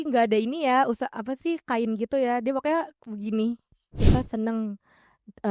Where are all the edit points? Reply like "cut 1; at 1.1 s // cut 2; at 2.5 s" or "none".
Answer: cut 1; at 4.0 s